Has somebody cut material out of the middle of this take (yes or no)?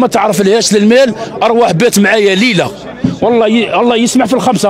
no